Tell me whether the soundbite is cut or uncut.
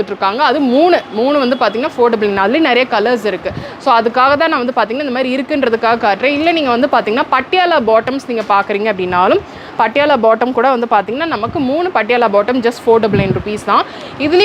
uncut